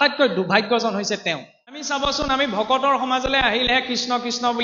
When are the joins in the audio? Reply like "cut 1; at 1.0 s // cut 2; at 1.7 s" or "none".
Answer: cut 1; at 1.9 s